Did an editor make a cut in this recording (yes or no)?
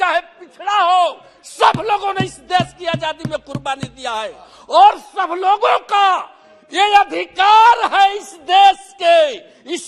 no